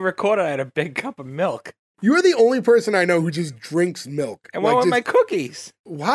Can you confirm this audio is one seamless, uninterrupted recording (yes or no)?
no